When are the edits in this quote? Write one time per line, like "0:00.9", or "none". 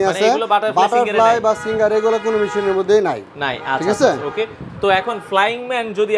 none